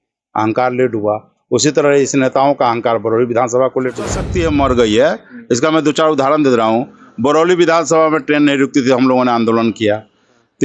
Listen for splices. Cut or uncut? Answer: cut